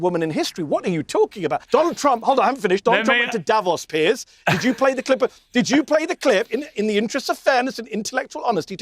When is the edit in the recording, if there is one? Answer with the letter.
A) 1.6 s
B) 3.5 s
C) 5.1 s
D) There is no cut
A